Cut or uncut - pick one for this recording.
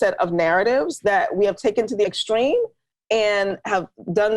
cut